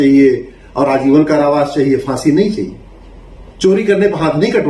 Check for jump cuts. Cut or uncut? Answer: uncut